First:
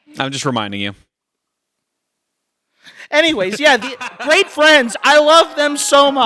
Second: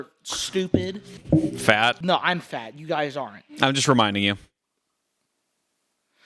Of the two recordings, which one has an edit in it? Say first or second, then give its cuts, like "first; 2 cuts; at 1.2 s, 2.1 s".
second; 2 cuts; at 1.1 s, 2.0 s